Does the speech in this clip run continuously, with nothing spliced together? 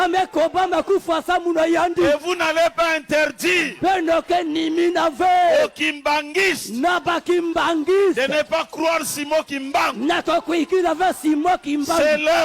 yes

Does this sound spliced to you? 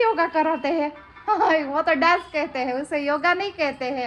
no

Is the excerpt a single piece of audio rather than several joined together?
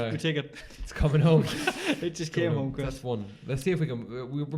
yes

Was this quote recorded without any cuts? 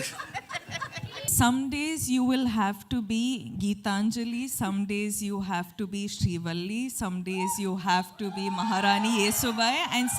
no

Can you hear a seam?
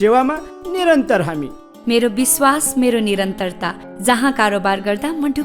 no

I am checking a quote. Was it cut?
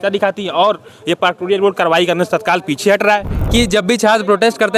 yes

